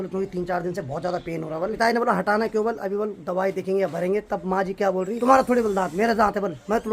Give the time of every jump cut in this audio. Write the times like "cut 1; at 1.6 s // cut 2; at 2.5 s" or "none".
cut 1; at 1.7 s // cut 2; at 5.2 s